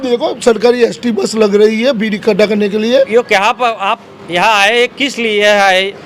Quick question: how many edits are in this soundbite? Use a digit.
1